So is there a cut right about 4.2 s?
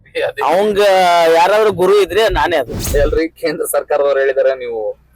no; 1 cut; at 2.8 s

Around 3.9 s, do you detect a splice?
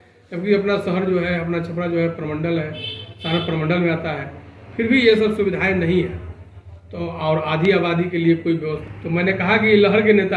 no; 1 cut; at 8.8 s

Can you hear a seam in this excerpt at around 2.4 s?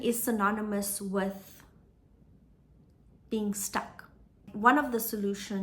no; 1 cut; at 4.5 s

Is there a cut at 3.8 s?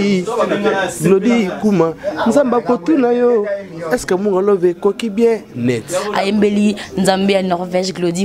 no; 1 cut; at 6.0 s

